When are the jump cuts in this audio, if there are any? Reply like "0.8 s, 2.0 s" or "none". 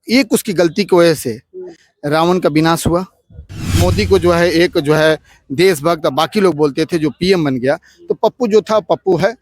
3.8 s